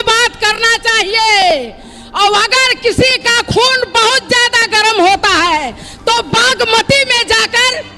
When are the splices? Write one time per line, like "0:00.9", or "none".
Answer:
none